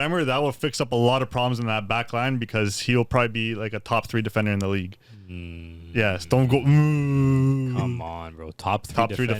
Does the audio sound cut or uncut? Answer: uncut